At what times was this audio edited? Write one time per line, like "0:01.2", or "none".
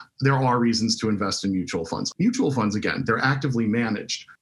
none